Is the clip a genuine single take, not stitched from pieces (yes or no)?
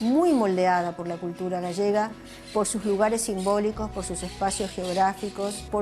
yes